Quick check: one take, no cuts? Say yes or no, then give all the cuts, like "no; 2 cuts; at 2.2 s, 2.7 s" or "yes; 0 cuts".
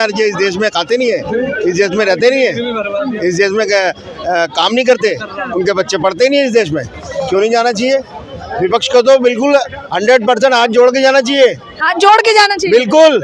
yes; 0 cuts